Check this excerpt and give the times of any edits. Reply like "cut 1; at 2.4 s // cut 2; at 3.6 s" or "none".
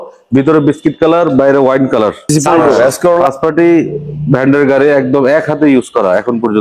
cut 1; at 3.3 s